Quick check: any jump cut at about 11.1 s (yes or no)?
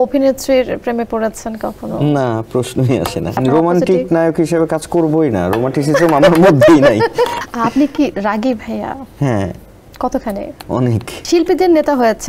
yes